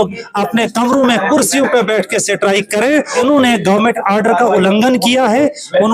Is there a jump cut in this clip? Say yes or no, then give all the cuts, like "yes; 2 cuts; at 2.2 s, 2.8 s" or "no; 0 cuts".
yes; 1 cut; at 3.2 s